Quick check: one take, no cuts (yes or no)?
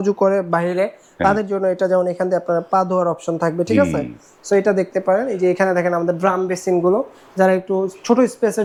yes